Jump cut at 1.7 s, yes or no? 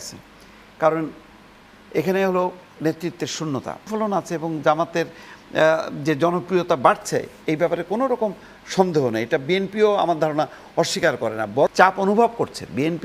no